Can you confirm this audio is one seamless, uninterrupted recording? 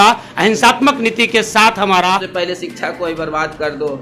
no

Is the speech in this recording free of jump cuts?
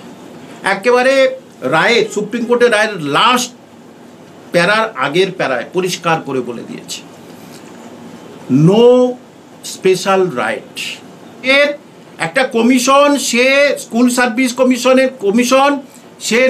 no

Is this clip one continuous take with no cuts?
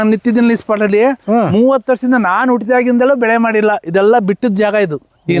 yes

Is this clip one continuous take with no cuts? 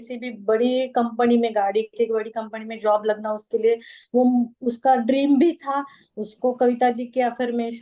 yes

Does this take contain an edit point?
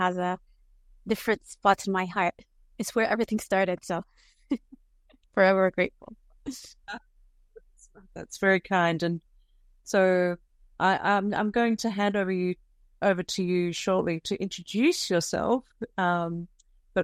no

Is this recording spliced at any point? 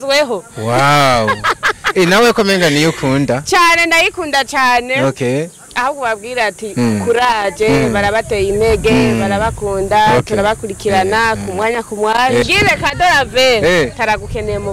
yes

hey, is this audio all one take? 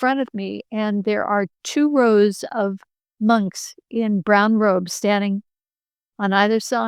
yes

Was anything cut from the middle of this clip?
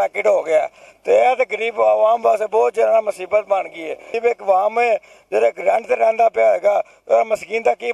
yes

